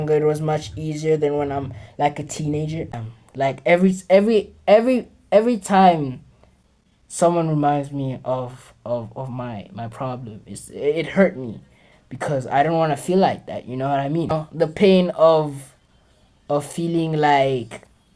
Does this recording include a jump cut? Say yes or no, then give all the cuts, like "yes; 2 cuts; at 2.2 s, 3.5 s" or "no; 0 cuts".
yes; 2 cuts; at 2.9 s, 14.3 s